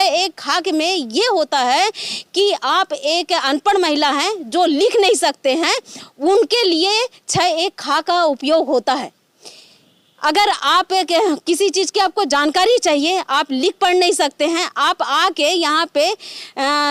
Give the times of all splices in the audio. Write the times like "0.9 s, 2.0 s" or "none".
none